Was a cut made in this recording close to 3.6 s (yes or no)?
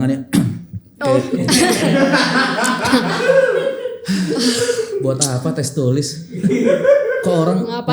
no